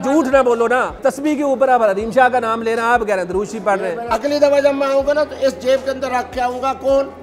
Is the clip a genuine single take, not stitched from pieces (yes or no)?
no